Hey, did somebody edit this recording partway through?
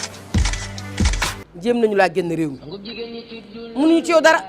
yes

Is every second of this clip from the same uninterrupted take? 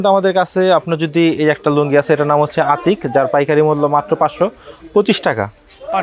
yes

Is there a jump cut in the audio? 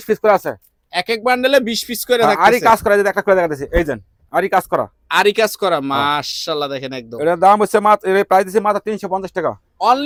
no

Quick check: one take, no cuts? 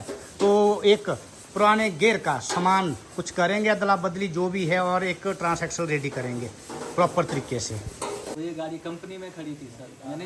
no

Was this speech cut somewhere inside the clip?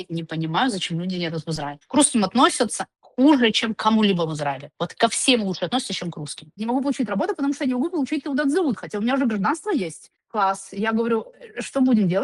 yes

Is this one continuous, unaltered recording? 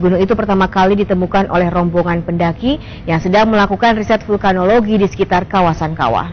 yes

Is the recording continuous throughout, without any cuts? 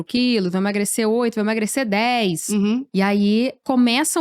no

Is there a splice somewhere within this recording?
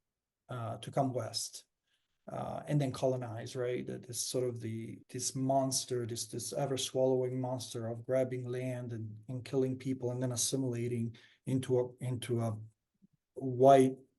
yes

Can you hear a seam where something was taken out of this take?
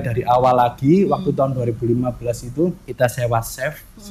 yes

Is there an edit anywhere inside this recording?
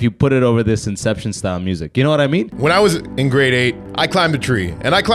yes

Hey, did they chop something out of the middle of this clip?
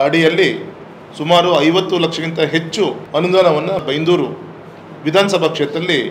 yes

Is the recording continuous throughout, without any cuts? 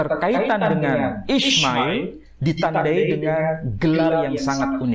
yes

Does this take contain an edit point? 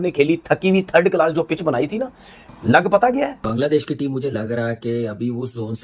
yes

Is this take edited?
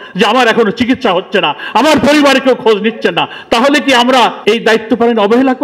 yes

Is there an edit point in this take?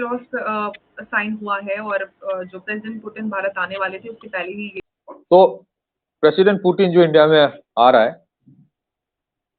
yes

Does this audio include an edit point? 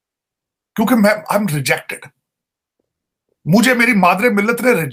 no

